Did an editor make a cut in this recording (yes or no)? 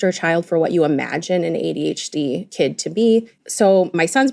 yes